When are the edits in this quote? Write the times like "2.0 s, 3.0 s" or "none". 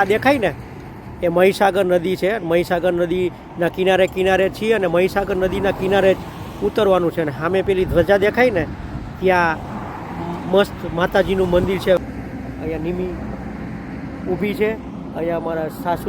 12.0 s